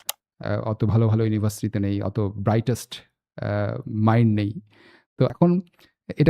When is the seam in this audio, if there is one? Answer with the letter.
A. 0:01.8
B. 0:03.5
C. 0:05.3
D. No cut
C